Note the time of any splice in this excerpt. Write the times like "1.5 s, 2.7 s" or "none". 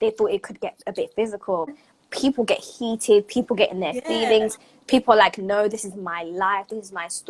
1.8 s